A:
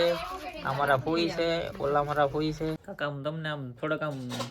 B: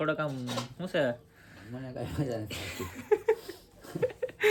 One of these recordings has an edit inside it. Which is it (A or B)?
A